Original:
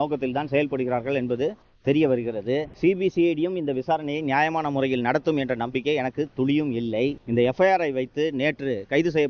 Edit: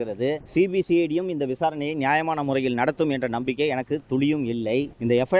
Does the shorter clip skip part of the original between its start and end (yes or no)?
no